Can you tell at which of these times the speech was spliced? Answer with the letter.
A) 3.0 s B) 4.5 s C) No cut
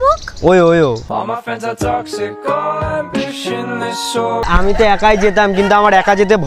B